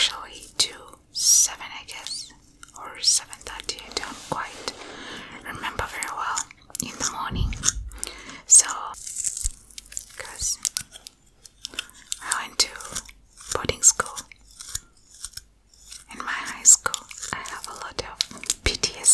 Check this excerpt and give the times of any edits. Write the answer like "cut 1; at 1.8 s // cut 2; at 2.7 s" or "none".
cut 1; at 8.9 s // cut 2; at 17.2 s